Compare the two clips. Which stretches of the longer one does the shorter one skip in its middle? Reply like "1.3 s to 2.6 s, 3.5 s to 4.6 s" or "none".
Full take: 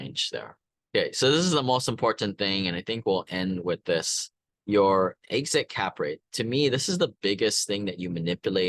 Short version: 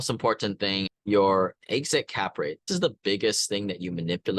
2.7 s to 4.5 s, 6.3 s to 6.8 s